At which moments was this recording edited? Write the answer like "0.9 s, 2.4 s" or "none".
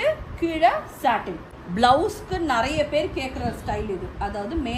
1.4 s